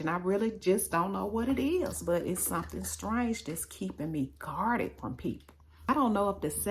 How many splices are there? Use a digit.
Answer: 1